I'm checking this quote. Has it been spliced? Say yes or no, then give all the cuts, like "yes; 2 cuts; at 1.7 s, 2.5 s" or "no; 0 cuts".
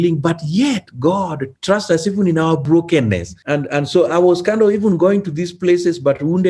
yes; 3 cuts; at 1.4 s, 2.6 s, 3.3 s